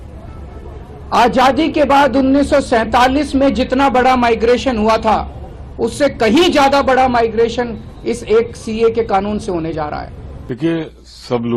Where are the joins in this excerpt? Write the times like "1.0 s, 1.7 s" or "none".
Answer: none